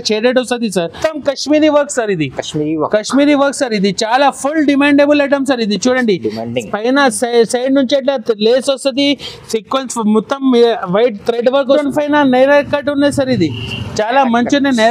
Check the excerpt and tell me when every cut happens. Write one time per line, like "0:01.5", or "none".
0:01.0
0:11.8